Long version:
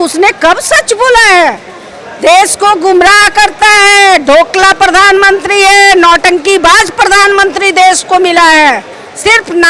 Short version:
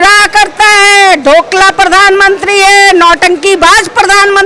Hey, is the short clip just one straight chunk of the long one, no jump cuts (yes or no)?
yes